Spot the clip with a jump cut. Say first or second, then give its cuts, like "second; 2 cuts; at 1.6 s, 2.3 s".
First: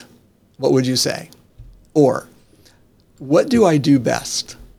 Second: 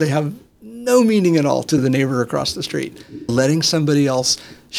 second; 2 cuts; at 1.8 s, 3.3 s